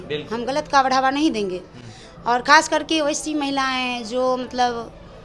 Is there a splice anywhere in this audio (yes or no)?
no